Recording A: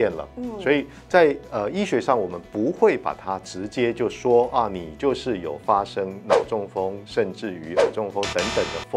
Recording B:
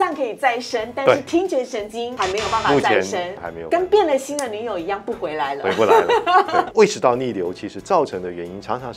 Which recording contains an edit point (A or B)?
B